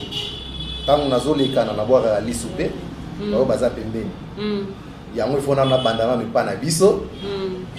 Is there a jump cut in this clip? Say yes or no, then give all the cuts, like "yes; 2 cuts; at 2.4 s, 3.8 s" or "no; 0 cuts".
no; 0 cuts